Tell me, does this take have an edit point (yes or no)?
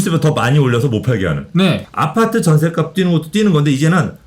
yes